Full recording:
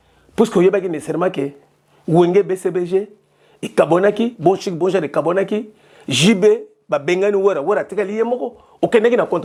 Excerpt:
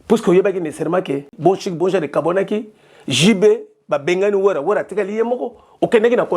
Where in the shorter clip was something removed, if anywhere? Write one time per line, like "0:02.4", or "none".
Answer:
0:01.3